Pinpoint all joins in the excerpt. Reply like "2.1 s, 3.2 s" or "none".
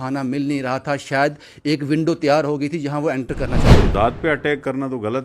3.9 s